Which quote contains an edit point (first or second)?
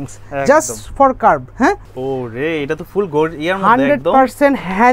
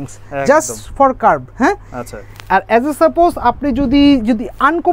first